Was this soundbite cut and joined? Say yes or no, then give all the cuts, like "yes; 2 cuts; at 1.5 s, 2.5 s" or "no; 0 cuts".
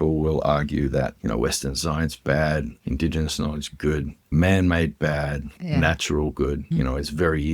yes; 5 cuts; at 1.2 s, 2.7 s, 4.3 s, 5.6 s, 6.6 s